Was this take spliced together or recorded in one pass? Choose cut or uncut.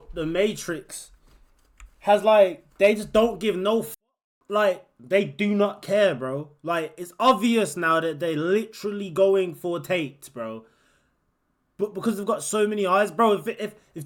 uncut